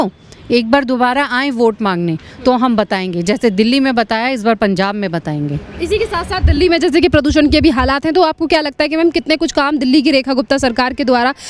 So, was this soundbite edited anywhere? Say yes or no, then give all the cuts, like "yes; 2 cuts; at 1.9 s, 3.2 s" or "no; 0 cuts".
no; 0 cuts